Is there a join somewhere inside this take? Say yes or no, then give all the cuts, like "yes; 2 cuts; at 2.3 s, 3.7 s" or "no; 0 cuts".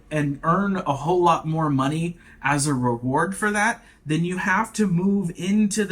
no; 0 cuts